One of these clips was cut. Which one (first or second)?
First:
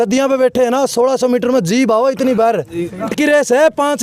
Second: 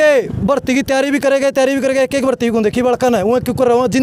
first